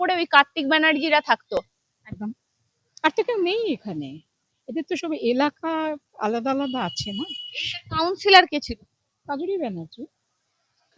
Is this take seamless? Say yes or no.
yes